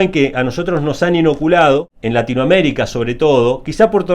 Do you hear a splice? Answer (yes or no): yes